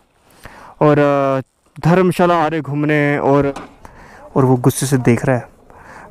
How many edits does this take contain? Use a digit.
1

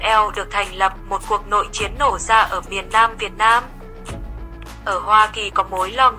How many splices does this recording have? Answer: 0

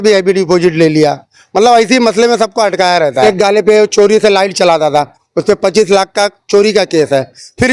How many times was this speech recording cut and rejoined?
1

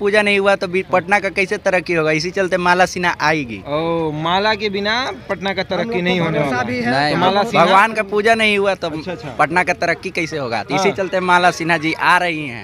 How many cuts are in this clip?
0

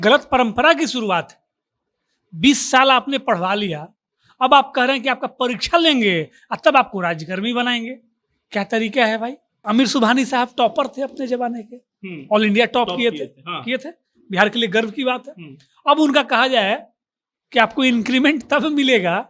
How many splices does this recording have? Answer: 1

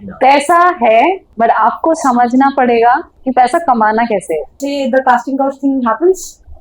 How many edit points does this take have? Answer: 3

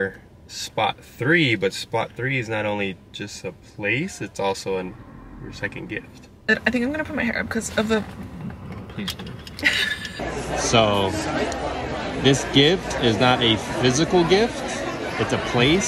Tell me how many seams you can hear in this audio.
2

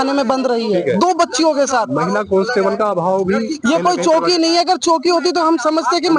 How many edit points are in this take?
0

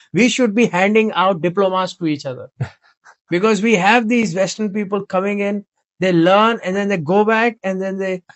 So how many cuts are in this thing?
0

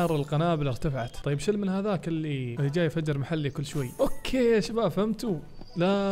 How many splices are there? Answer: 3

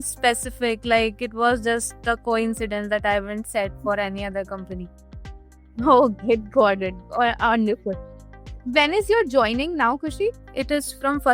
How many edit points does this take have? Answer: 1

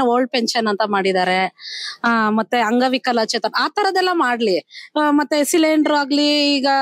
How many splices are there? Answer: 0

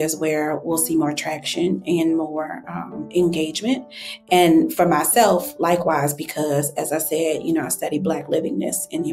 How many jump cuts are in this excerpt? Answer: 0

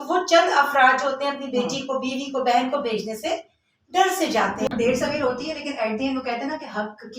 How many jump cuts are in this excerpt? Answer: 1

